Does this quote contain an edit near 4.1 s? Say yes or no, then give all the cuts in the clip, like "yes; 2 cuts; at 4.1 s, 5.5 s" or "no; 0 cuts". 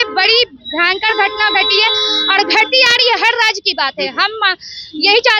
no; 0 cuts